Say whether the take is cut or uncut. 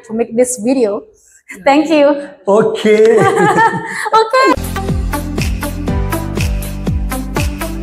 cut